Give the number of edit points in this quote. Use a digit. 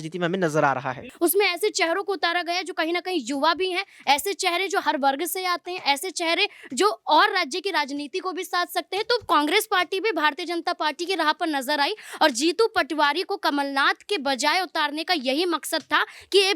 1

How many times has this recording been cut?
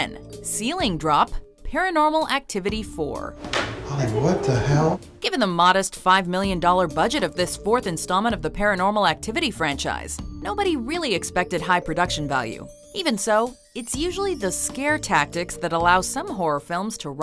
0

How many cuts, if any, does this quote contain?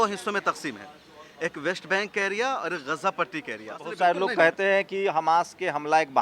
1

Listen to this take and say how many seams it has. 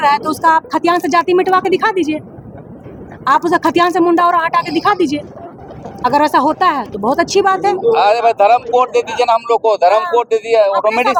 0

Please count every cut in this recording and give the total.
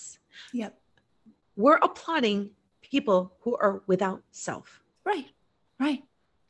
0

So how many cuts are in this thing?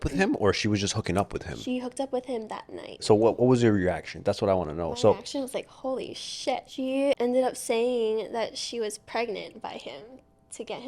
2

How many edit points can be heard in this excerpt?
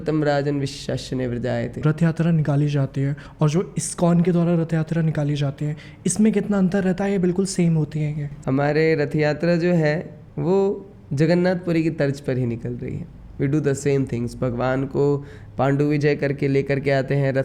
2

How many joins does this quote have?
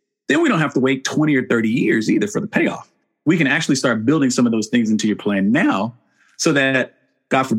1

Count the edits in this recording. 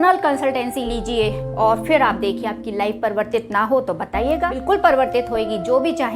1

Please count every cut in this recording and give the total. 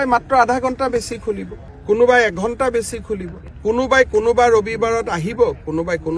0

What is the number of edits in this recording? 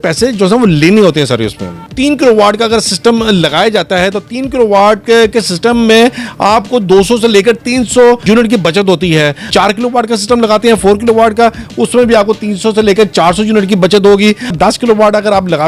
3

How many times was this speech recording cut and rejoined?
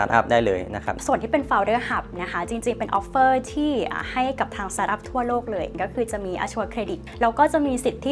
3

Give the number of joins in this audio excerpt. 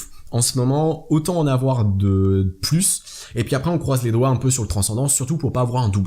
1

